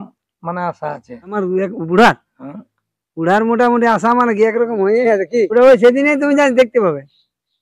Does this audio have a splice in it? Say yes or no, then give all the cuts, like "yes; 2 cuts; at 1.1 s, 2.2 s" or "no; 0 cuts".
yes; 2 cuts; at 1.3 s, 5.5 s